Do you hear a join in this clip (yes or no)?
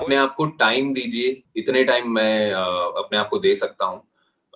yes